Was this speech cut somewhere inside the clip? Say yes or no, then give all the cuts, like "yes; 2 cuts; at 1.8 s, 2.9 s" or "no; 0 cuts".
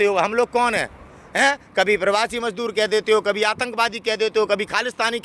no; 0 cuts